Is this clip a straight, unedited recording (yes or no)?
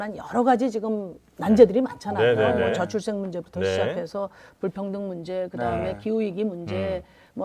yes